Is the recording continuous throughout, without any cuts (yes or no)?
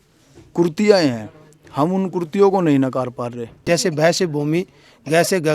no